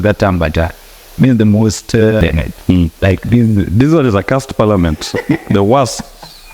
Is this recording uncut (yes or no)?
no